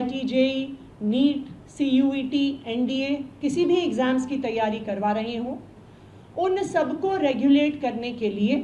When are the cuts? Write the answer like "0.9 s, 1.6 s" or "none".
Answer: none